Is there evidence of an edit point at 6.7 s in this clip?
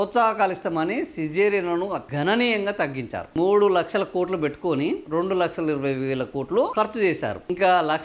no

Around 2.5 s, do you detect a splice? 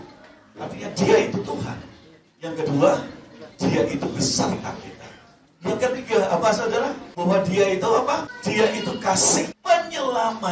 no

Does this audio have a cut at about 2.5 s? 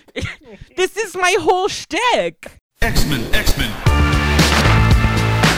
yes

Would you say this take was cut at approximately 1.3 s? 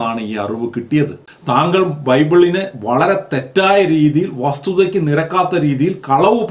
yes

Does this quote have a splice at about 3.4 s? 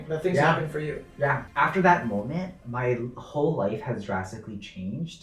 no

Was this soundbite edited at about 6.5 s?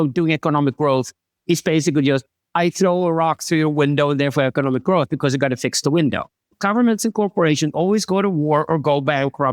yes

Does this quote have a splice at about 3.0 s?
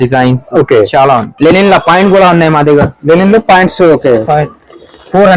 no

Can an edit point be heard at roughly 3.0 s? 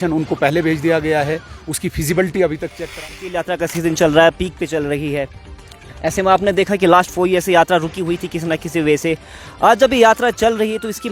yes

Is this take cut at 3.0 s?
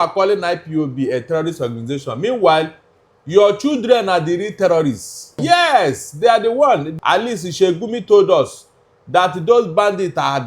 no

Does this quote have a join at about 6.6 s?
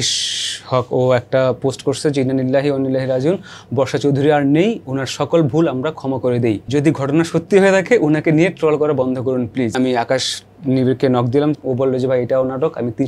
yes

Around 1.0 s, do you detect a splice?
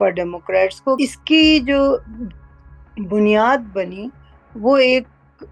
yes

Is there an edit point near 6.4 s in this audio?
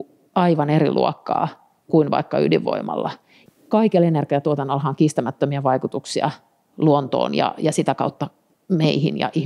no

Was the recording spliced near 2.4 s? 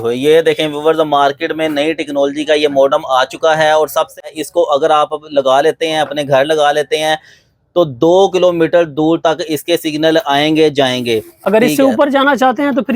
no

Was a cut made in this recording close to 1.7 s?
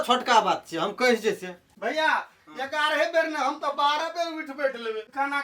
yes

